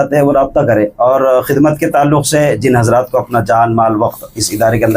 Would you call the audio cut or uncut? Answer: uncut